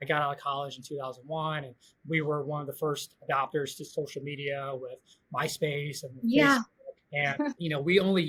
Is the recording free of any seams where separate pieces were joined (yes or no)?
yes